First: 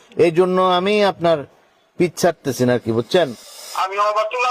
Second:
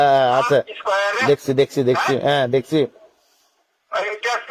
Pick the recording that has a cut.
first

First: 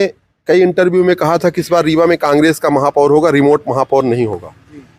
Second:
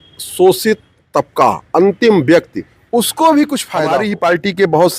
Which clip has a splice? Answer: second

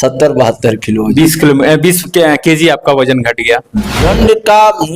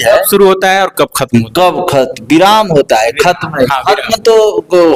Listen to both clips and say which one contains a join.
first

